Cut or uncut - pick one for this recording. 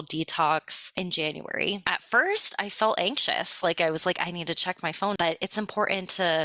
cut